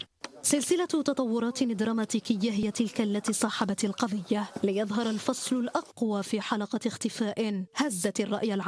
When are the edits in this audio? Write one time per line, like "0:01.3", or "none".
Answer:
0:02.4

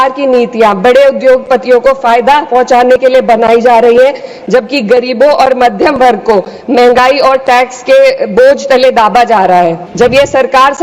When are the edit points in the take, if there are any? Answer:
0:09.8

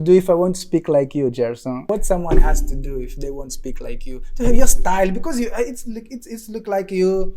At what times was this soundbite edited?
0:01.8

